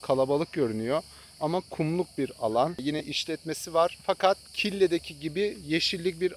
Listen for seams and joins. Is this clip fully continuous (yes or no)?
no